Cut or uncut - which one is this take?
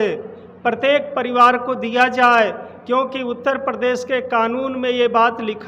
uncut